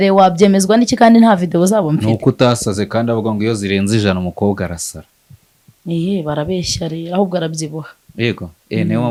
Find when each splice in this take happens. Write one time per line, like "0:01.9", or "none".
none

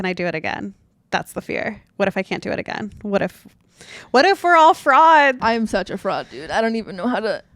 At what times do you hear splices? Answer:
0:05.4

